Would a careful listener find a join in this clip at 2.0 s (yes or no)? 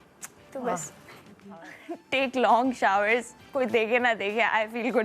yes